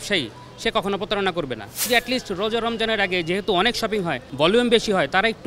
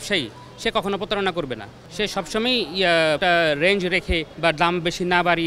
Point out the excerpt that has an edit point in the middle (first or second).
first